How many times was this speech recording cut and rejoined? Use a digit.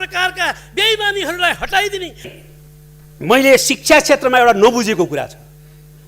1